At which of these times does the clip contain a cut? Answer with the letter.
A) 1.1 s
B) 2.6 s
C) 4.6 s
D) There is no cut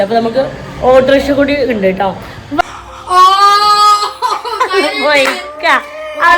B